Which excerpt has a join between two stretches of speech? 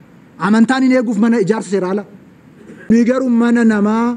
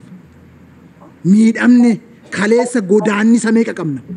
first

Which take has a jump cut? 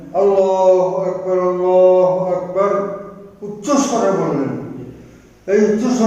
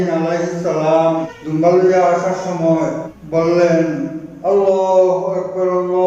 second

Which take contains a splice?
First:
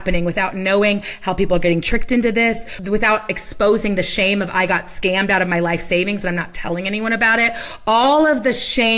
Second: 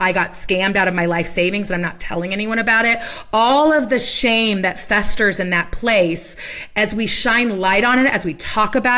first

